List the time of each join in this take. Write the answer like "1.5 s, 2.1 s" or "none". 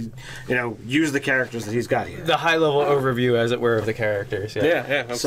3.9 s